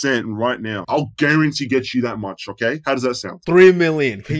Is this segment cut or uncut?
cut